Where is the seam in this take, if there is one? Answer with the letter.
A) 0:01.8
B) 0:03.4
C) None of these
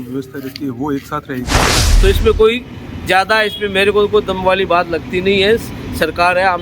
A